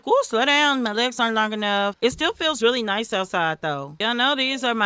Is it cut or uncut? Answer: uncut